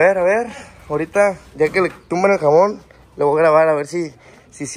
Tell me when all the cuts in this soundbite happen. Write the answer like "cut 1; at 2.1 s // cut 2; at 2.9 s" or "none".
none